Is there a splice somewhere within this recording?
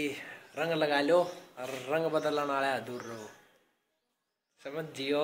no; 0 cuts

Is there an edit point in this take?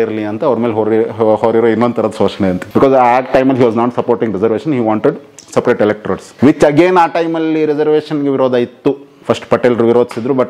yes; 3 cuts; at 2.6 s, 6.3 s, 9.1 s

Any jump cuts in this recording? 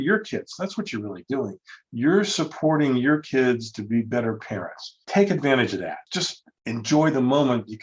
yes; 2 cuts; at 4.9 s, 6.1 s

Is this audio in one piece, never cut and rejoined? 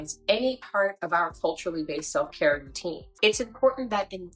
no; 1 cut; at 3.1 s

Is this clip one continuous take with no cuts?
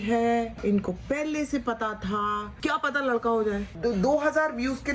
no; 2 cuts; at 2.5 s, 3.7 s

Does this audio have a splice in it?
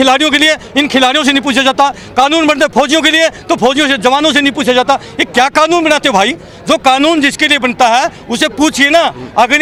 no; 0 cuts

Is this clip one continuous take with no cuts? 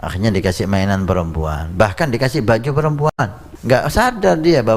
no; 1 cut; at 3.5 s

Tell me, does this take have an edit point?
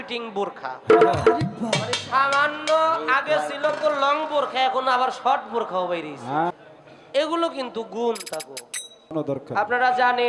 yes; 2 cuts; at 6.5 s, 9.1 s

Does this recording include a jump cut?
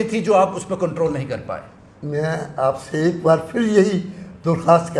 no; 0 cuts

